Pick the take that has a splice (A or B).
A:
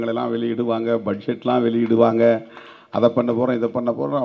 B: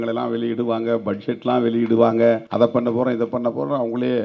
B